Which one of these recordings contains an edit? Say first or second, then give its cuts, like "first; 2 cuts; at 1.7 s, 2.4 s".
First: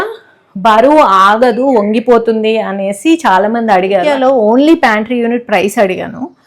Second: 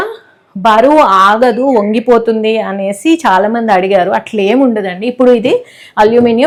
first; 1 cut; at 4.1 s